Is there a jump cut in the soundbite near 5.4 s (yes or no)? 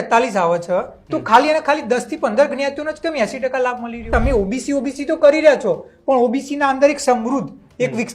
no